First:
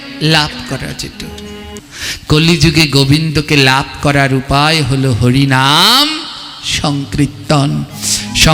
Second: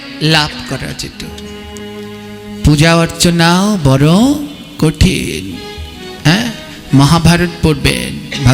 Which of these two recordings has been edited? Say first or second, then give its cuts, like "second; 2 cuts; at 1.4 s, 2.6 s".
first; 1 cut; at 1.8 s